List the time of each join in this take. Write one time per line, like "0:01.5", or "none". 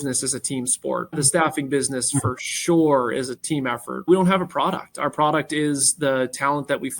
0:01.1
0:03.5